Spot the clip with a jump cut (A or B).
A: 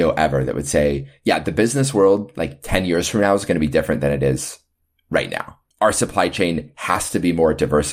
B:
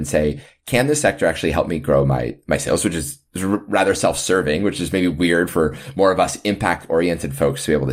A